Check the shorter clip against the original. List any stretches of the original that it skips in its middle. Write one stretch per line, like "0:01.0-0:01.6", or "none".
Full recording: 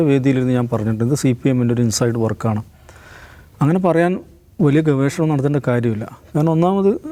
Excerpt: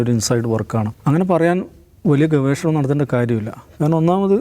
0:02.6-0:03.5